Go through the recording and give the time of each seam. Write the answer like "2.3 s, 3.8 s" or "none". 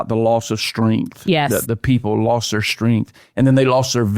1.6 s

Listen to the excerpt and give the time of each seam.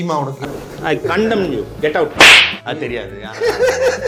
none

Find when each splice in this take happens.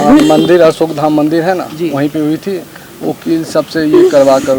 none

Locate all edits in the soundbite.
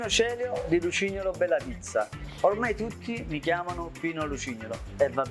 none

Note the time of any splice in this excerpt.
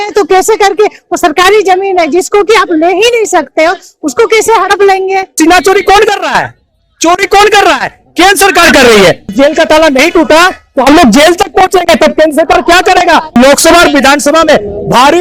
5.3 s, 9.3 s, 13.4 s

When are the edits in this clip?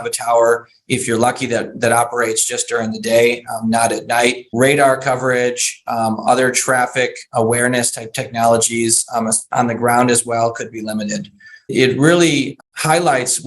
4.4 s, 11.7 s, 12.5 s

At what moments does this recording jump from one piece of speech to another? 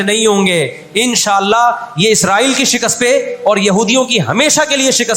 none

